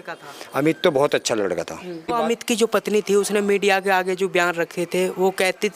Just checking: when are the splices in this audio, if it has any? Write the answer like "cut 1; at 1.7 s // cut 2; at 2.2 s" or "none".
cut 1; at 2.1 s